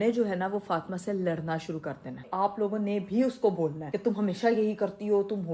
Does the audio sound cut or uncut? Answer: cut